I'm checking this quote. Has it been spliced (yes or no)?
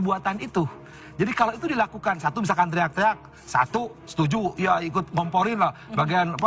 no